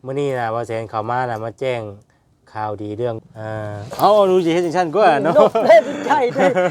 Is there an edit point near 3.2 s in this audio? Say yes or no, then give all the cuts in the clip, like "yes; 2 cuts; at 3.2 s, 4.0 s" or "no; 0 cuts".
yes; 1 cut; at 3.2 s